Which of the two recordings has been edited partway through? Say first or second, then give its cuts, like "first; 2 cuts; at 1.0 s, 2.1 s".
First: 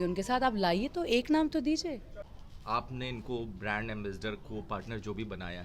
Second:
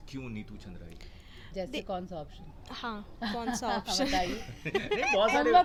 first; 1 cut; at 2.0 s